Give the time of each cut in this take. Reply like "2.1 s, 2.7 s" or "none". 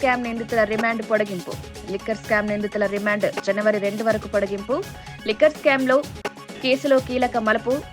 none